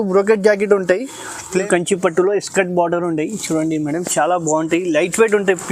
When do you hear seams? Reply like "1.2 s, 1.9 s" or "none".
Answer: 1.6 s